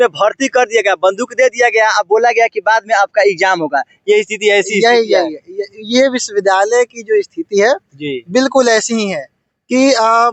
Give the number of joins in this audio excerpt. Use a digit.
0